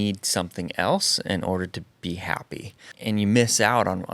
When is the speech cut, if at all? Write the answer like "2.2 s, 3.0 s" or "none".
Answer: 2.9 s